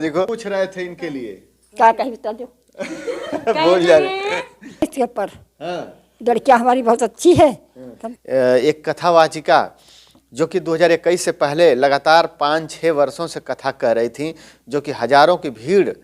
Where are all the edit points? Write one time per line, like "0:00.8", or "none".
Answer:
0:08.0